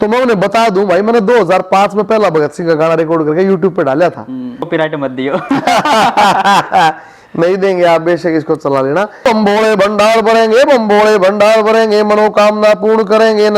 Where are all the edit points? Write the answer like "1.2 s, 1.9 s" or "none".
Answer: 4.6 s, 9.2 s